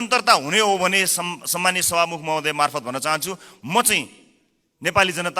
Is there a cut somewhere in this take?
no; 0 cuts

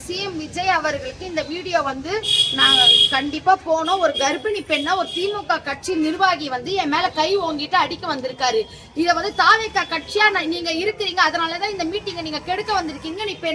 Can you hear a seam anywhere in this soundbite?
no; 0 cuts

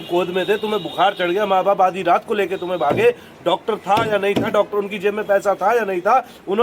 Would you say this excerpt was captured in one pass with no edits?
yes; 0 cuts

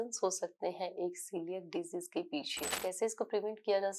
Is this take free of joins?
no; 1 cut; at 2.7 s

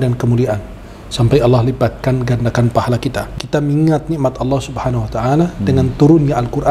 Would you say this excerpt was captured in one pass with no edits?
no; 1 cut; at 3.3 s

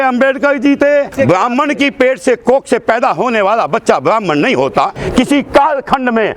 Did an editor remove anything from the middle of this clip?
yes; 2 cuts; at 1.1 s, 5.0 s

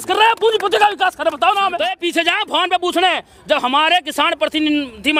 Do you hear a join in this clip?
yes; 1 cut; at 1.9 s

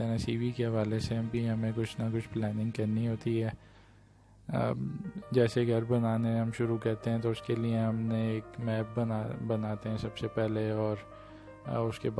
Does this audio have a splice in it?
no; 0 cuts

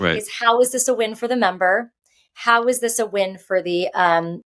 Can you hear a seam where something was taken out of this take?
no; 0 cuts

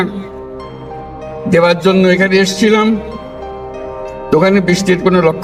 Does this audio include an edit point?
no; 0 cuts

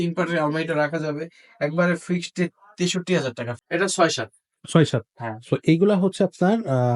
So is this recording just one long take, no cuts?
no; 1 cut; at 3.5 s

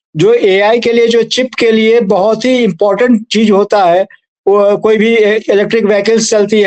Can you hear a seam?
no; 0 cuts

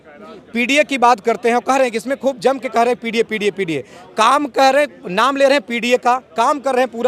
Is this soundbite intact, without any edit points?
yes; 0 cuts

